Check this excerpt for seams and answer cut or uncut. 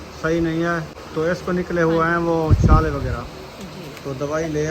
cut